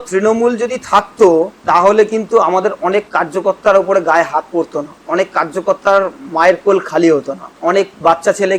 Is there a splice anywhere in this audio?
yes; 3 cuts; at 1.6 s, 4.9 s, 7.4 s

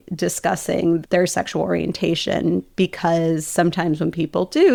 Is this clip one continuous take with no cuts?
yes; 0 cuts

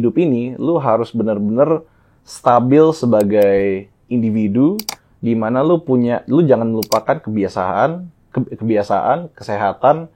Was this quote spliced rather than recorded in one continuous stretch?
no; 0 cuts

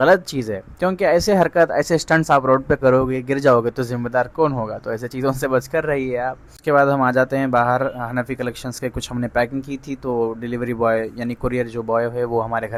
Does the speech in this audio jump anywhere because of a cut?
no; 0 cuts

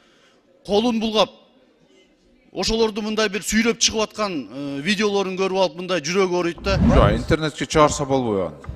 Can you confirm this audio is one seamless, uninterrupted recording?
no; 1 cut; at 6.8 s

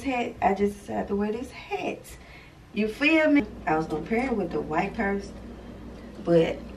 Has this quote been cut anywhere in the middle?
yes; 1 cut; at 3.4 s

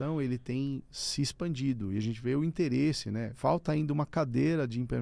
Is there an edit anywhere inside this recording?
yes; 1 cut; at 3.3 s

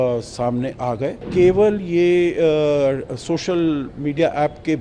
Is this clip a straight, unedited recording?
no; 1 cut; at 1.3 s

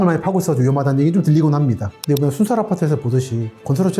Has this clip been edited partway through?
yes; 1 cut; at 1.9 s

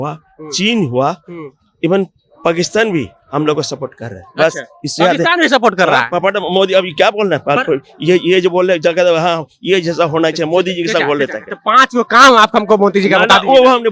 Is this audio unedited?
yes; 0 cuts

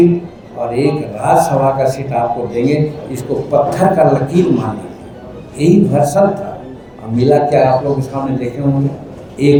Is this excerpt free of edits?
yes; 0 cuts

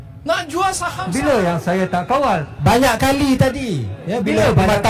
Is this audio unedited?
no; 1 cut; at 1.0 s

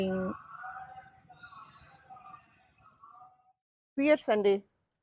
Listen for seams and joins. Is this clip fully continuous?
no; 1 cut; at 3.4 s

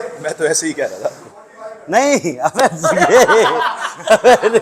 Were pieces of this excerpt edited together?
no; 0 cuts

